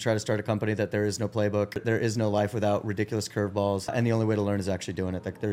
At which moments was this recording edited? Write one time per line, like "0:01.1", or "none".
0:01.8
0:03.9